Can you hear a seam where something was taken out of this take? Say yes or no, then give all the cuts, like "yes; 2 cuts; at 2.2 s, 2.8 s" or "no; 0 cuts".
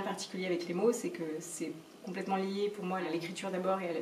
yes; 1 cut; at 3.0 s